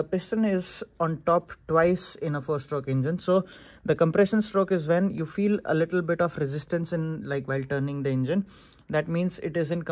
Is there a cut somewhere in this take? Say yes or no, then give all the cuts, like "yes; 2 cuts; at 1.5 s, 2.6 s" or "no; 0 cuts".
no; 0 cuts